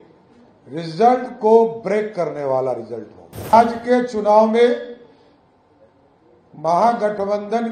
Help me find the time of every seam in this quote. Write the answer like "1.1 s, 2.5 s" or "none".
3.5 s

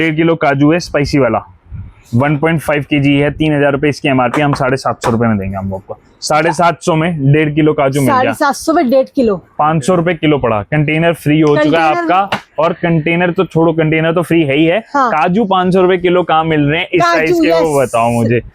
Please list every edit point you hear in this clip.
none

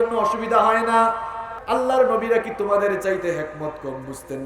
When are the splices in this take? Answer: 1.5 s

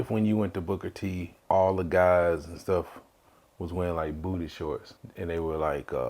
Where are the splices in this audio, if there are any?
1.3 s, 5.0 s

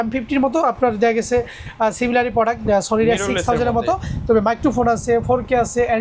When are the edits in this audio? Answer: none

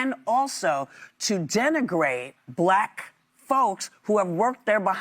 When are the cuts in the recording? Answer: 2.4 s

